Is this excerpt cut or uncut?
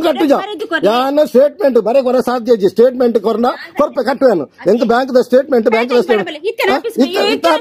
uncut